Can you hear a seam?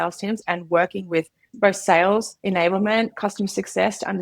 yes; 2 cuts; at 1.4 s, 2.3 s

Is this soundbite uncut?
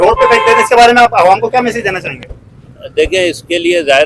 yes; 0 cuts

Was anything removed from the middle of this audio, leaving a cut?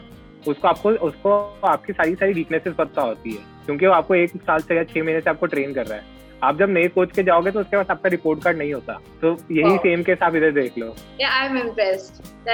no; 0 cuts

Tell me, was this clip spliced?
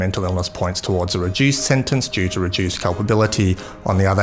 no; 0 cuts

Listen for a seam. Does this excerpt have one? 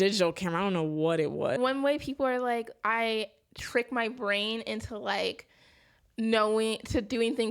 yes; 1 cut; at 1.6 s

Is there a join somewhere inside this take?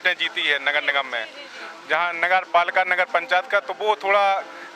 no; 0 cuts

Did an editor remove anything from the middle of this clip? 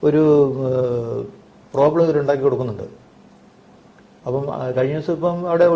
no; 0 cuts

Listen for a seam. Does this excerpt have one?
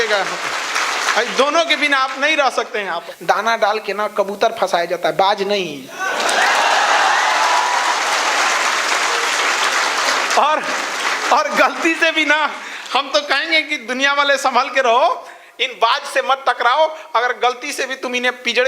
yes; 1 cut; at 3.1 s

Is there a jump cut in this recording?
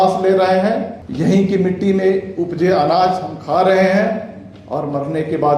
yes; 1 cut; at 1.0 s

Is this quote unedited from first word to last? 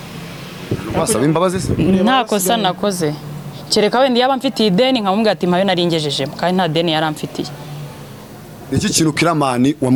yes; 0 cuts

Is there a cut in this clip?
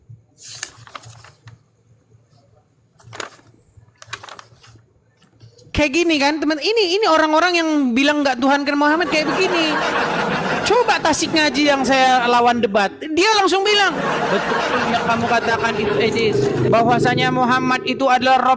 no; 0 cuts

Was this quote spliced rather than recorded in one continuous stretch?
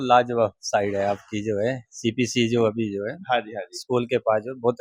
no; 0 cuts

